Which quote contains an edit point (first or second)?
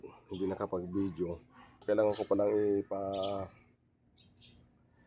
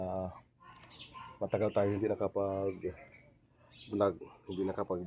first